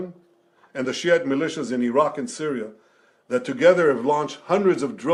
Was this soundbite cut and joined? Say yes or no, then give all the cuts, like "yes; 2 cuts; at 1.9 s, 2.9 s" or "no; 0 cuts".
no; 0 cuts